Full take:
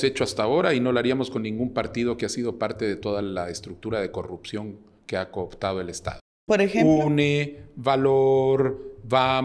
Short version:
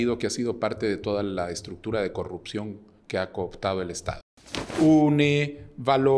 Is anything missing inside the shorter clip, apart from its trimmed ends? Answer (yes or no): no